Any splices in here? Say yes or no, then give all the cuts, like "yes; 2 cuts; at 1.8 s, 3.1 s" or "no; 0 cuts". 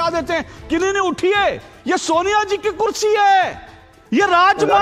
no; 0 cuts